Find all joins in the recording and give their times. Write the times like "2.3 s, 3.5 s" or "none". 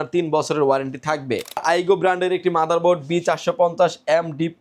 1.6 s